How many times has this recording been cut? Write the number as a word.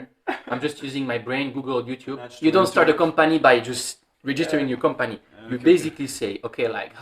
one